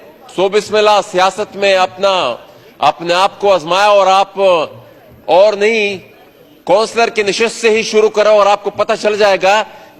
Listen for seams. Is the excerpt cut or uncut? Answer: uncut